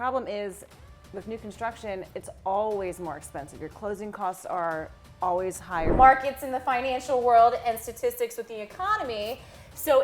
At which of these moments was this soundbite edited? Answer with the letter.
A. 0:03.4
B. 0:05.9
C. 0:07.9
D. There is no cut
B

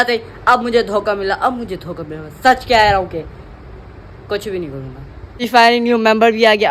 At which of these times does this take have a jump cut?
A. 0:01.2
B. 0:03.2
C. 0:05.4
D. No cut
C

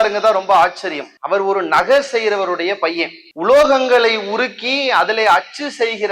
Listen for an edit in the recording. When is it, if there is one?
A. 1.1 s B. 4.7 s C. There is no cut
C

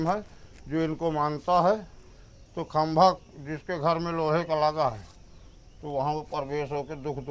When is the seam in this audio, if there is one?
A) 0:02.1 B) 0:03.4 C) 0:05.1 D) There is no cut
D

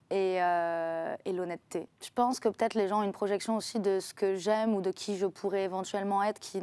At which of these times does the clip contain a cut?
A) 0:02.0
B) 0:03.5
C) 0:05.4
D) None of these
A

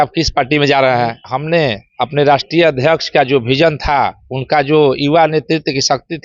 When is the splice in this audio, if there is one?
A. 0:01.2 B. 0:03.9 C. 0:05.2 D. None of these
A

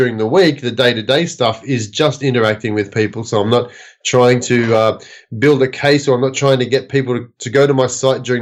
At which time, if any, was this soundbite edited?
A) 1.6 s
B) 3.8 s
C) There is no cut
C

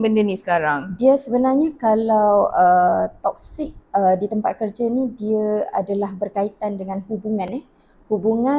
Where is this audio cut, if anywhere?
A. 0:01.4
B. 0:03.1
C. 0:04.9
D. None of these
D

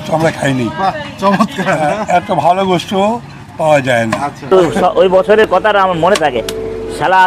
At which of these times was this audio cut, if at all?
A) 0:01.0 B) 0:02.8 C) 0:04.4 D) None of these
C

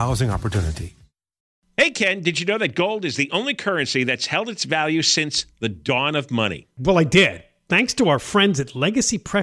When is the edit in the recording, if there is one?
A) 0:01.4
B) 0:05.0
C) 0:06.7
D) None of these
A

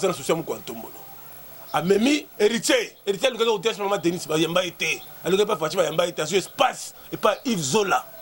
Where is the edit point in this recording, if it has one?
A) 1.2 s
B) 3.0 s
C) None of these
A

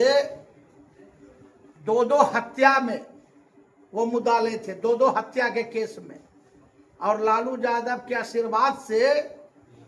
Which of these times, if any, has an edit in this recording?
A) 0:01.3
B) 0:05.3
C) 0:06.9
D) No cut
D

